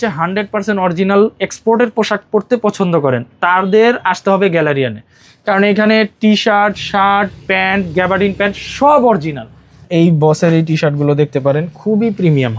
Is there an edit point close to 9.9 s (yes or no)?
yes